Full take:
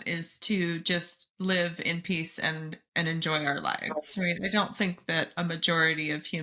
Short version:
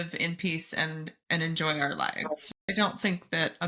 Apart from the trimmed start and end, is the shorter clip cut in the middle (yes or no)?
yes